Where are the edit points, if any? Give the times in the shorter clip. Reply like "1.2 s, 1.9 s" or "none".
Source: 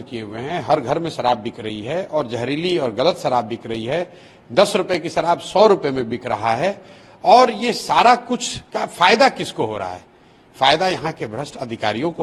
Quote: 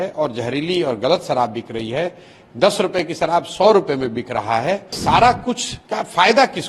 4.9 s